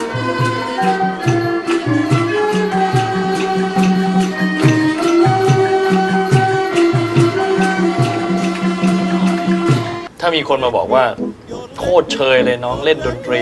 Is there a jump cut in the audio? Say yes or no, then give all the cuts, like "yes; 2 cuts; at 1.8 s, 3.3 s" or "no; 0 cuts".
yes; 1 cut; at 10.0 s